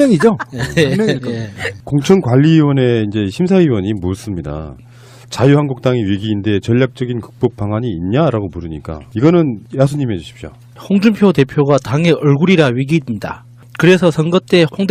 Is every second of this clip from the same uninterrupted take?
yes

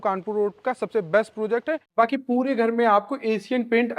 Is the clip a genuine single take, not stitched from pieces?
no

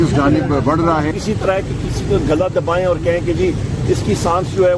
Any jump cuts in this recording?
yes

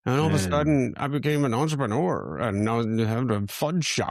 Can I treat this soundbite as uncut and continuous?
yes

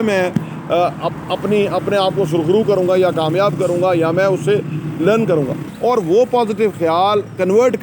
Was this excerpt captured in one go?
no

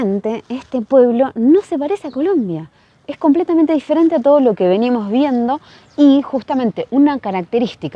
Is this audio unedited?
yes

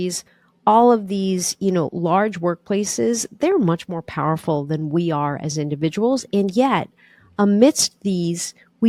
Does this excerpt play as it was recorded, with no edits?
yes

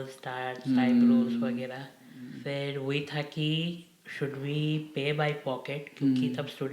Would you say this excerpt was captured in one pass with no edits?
no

